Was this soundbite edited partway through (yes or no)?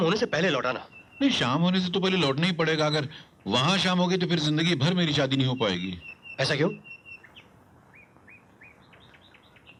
no